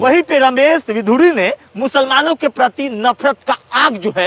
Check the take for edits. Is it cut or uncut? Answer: uncut